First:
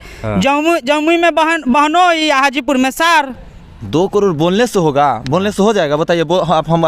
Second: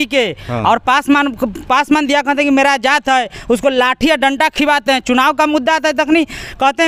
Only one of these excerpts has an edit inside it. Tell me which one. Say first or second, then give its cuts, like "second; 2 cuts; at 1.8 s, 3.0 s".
first; 1 cut; at 3.6 s